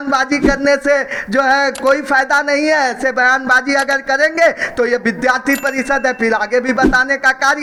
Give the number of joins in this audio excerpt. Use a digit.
0